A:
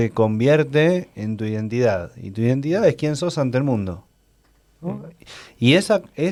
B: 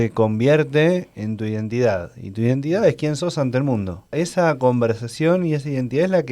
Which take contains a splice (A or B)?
B